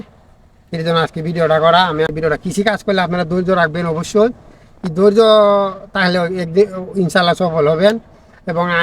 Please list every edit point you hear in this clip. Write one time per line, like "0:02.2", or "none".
0:02.1